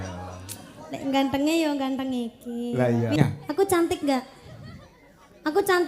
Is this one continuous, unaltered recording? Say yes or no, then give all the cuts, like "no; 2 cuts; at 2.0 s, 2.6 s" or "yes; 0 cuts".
no; 1 cut; at 3.2 s